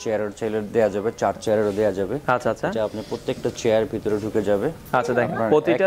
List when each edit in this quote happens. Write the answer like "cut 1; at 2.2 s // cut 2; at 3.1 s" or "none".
none